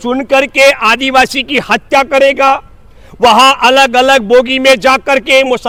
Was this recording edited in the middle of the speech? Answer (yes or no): no